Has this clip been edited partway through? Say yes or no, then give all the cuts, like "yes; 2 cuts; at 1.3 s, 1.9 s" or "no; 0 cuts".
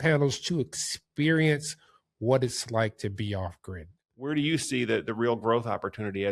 yes; 1 cut; at 4.3 s